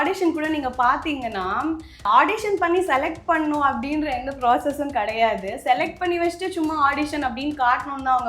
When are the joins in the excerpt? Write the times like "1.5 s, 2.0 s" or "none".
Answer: 2.0 s